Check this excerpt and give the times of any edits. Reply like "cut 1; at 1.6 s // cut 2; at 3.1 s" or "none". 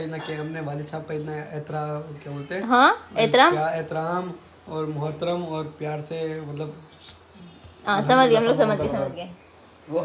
none